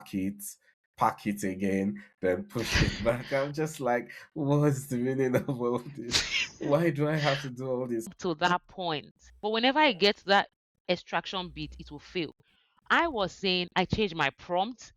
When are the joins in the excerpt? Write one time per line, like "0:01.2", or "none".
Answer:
0:08.1